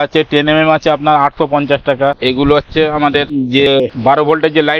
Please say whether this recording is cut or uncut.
cut